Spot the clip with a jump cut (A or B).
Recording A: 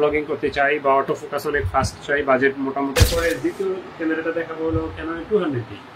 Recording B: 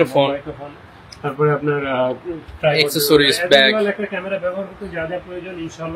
A